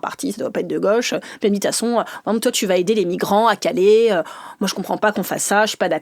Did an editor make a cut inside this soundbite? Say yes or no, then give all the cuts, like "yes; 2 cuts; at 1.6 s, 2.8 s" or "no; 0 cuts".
no; 0 cuts